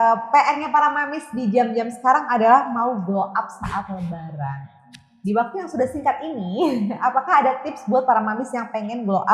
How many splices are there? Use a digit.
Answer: 0